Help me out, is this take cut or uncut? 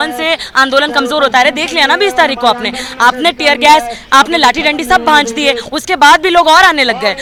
uncut